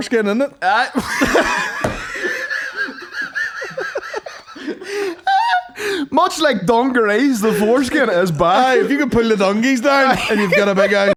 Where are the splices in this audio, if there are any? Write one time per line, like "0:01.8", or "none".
none